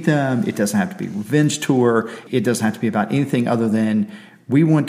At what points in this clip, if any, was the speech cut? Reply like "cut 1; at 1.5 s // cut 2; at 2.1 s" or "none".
cut 1; at 2.2 s